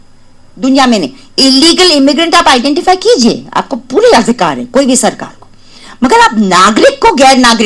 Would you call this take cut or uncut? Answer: uncut